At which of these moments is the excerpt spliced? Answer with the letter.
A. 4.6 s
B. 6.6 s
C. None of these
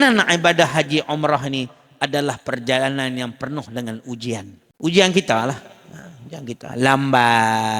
A